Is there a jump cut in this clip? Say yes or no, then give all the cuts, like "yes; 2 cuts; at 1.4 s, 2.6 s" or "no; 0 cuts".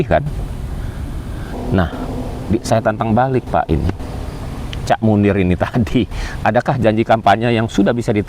yes; 1 cut; at 1.6 s